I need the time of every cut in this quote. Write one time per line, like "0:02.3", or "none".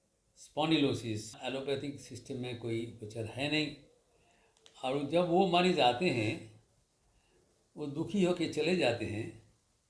0:01.4